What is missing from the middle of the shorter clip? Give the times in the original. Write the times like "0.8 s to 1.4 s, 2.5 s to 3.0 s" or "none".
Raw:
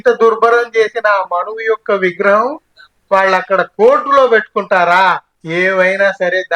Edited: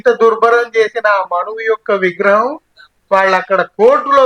none

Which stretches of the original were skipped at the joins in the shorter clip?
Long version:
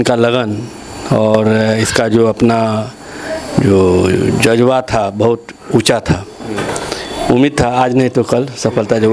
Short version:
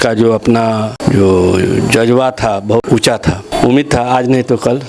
2.9 s to 3.4 s, 5.5 s to 6.7 s

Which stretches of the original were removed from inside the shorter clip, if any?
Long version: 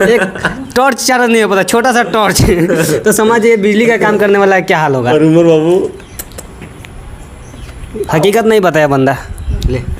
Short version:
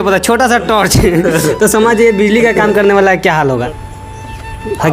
5.1 s to 6.9 s

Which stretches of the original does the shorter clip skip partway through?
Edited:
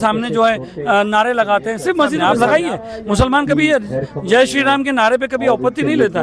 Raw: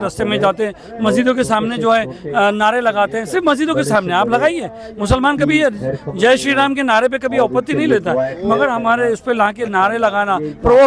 3.7 s to 4.1 s

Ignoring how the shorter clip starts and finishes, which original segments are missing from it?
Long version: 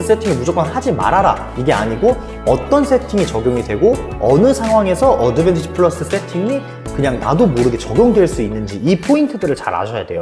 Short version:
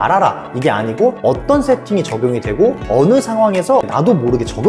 2.2 s to 2.4 s, 4.0 s to 4.1 s, 5.2 s to 7.2 s

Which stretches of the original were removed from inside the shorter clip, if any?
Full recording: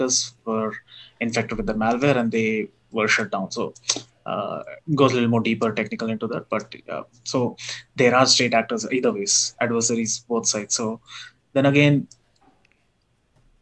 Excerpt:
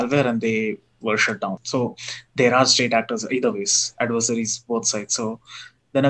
3.5 s to 7.2 s

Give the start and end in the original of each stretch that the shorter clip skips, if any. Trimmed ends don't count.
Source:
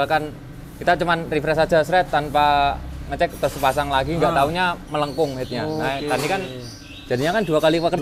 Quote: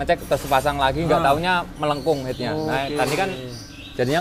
none

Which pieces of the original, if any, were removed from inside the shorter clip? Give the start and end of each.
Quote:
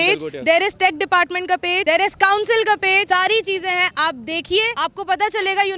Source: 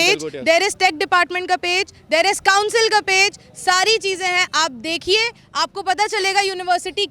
1.8 s to 2.0 s, 3.3 s to 3.6 s, 5.3 s to 5.5 s

